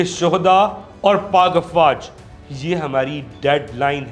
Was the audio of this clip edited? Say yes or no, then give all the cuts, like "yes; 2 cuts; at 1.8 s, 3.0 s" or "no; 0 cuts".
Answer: no; 0 cuts